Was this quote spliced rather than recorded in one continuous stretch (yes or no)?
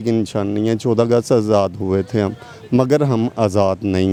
no